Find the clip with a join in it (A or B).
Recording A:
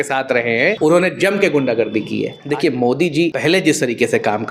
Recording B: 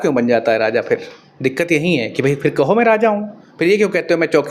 A